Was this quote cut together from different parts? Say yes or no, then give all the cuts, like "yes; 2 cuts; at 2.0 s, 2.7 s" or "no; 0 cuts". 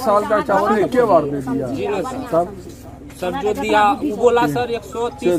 no; 0 cuts